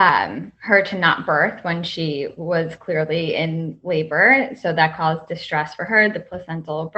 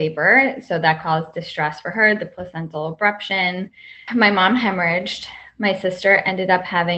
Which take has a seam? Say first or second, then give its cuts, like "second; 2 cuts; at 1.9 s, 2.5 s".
second; 1 cut; at 4.0 s